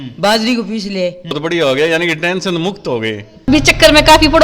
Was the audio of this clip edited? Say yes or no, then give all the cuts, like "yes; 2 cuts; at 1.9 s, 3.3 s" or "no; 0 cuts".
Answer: yes; 2 cuts; at 1.3 s, 3.4 s